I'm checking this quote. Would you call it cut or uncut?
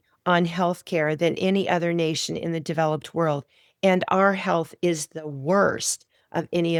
uncut